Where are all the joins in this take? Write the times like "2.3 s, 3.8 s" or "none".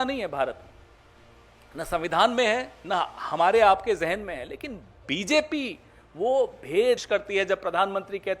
7.0 s

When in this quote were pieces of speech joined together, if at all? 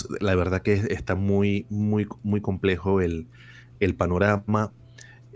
none

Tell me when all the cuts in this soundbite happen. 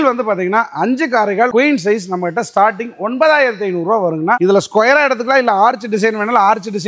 none

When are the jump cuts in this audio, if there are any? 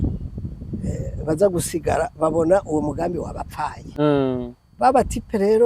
3.8 s

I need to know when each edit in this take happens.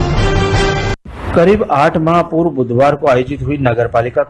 0.9 s

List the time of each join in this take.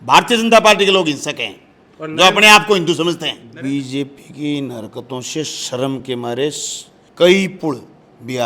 3.5 s

